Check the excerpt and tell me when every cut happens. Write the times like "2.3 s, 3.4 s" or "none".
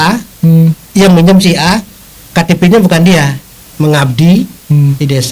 3.5 s